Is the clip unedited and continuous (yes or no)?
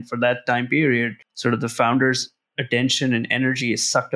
no